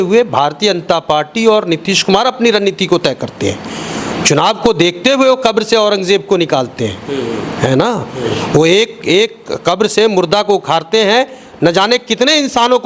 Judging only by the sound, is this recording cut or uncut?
uncut